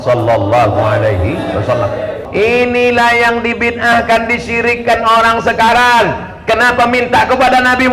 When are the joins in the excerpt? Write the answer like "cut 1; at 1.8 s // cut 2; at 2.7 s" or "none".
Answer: cut 1; at 2.2 s